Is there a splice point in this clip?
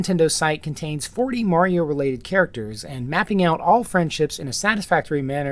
no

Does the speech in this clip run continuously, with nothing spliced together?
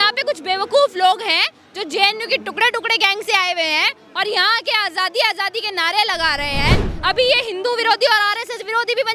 no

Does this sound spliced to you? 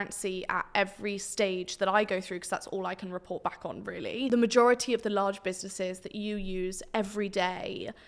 yes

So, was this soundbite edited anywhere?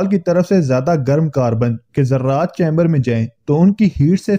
no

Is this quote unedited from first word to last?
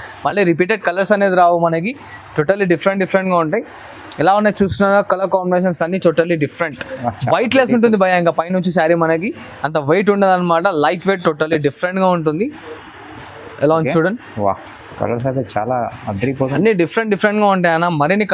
yes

